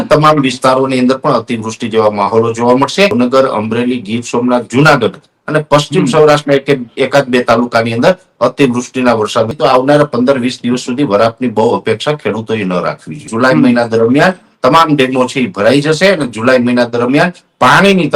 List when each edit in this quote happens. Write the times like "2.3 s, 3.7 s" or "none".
3.1 s, 9.5 s, 13.3 s